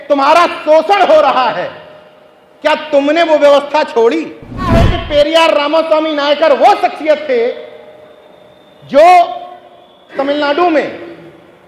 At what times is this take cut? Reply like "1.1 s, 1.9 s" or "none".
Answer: 5.0 s, 10.1 s

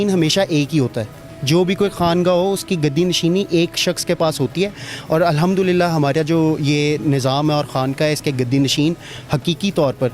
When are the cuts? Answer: none

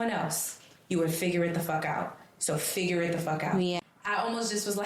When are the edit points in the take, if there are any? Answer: 3.8 s

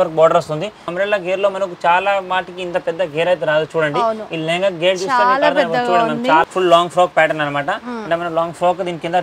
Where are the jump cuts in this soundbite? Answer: 0.9 s, 6.5 s

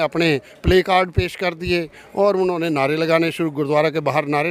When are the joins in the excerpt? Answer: none

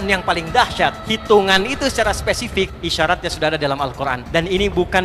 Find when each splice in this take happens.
1.1 s, 2.8 s, 4.2 s

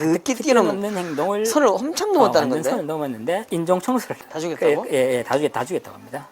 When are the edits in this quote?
4.2 s

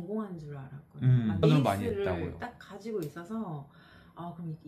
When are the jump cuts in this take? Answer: none

